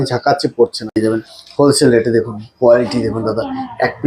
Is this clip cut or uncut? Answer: cut